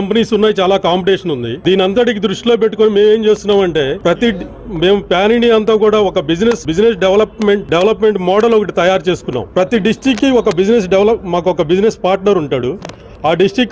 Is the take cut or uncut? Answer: cut